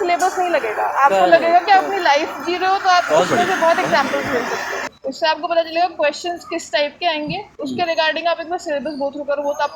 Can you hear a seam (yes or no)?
yes